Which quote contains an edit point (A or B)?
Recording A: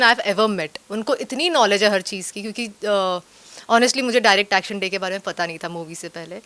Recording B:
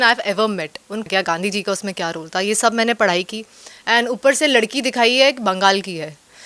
B